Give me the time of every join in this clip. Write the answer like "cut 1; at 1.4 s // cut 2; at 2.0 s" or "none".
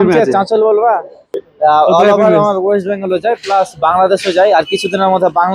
cut 1; at 1.4 s